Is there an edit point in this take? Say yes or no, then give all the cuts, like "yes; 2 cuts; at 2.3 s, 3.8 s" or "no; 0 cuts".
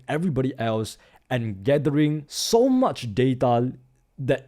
yes; 1 cut; at 2.3 s